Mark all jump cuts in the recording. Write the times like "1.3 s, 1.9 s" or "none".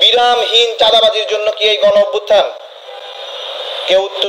none